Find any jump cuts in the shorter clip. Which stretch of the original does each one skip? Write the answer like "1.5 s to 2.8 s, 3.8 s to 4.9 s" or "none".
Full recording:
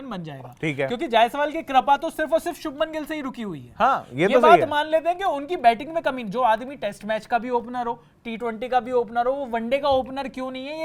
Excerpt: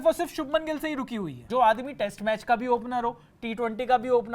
3.7 s to 6.2 s